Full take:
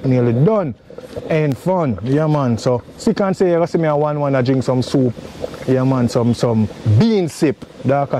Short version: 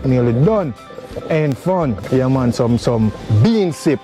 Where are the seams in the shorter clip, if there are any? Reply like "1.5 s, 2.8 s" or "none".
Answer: 2.0 s